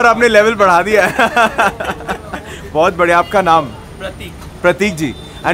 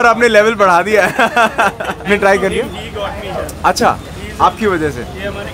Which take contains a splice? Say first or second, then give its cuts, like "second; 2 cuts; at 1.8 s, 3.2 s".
second; 1 cut; at 2.1 s